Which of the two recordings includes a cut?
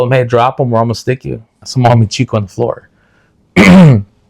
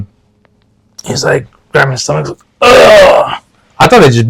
first; 1 cut; at 1.6 s

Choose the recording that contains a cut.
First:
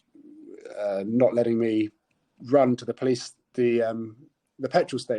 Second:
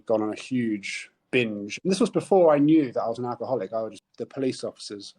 second; 1 cut; at 4.0 s

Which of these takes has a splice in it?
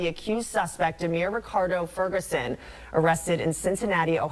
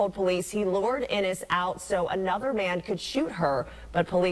second; 1 cut; at 1.4 s

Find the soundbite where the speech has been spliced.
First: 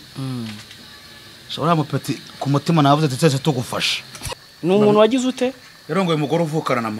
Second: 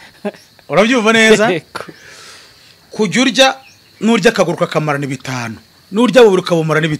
first; 1 cut; at 4.3 s

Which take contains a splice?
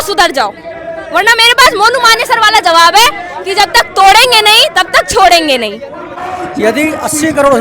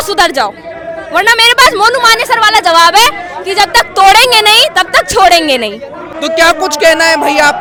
first; 1 cut; at 6.1 s

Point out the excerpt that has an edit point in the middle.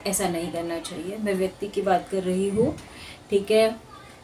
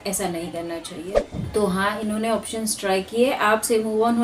second; 1 cut; at 1.1 s

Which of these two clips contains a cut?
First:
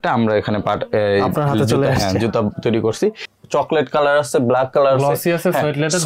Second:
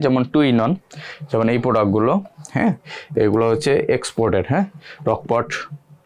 first; 1 cut; at 3.3 s

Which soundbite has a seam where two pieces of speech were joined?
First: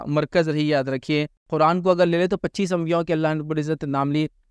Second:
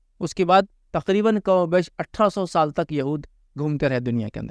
first; 1 cut; at 1.4 s

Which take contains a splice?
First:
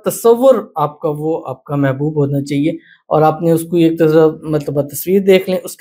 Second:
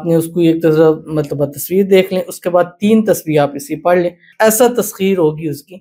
second; 1 cut; at 4.3 s

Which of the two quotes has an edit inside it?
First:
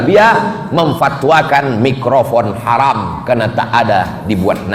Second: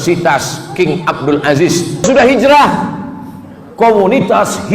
second; 1 cut; at 2.0 s

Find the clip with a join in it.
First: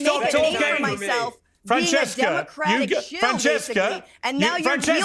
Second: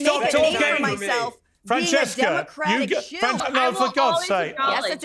second; 1 cut; at 3.4 s

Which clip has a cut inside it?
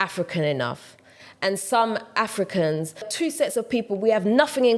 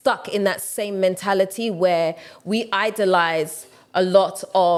first; 1 cut; at 3.1 s

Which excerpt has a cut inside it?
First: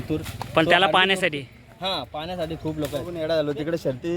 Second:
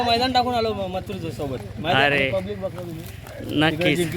first; 1 cut; at 3.1 s

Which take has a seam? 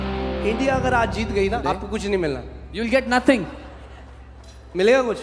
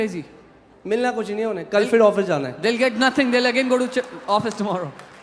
first; 1 cut; at 1.6 s

